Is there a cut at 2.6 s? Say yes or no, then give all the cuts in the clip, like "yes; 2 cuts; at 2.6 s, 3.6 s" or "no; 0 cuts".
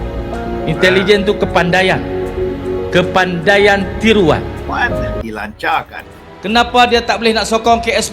no; 1 cut; at 5.1 s